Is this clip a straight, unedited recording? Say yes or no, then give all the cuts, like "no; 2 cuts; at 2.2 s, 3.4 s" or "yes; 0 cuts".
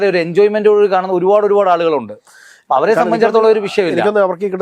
yes; 0 cuts